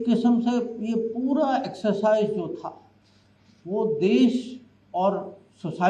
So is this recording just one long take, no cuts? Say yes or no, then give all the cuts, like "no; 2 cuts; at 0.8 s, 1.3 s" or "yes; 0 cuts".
yes; 0 cuts